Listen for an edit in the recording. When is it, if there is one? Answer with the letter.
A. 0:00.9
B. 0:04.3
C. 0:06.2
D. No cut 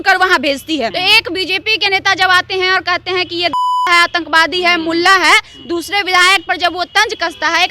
A